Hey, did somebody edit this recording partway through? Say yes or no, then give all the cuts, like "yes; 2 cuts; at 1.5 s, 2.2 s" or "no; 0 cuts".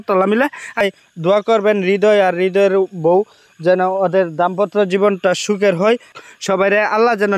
yes; 2 cuts; at 0.8 s, 6.2 s